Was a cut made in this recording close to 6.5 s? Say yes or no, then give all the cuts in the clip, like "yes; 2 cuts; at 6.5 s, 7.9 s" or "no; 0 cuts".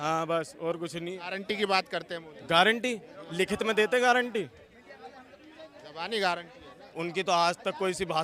no; 1 cut; at 1.4 s